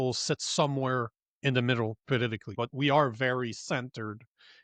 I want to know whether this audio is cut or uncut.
cut